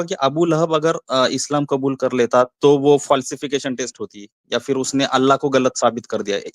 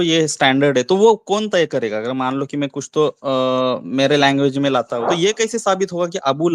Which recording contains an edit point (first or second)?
second